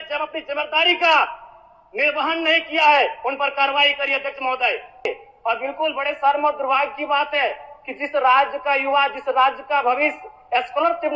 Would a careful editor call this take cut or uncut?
cut